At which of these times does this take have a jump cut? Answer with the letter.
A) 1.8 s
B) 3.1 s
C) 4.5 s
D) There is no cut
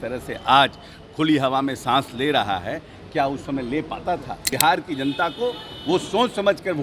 C